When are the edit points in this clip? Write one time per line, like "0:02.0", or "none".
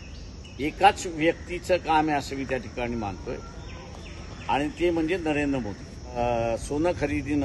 0:06.2